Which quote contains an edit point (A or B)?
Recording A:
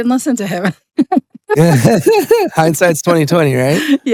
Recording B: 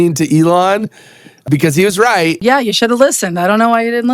B